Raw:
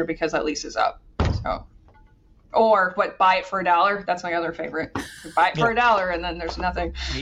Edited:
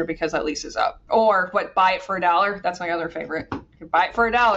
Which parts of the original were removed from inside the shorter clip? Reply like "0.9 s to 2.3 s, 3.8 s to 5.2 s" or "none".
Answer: 1.0 s to 2.4 s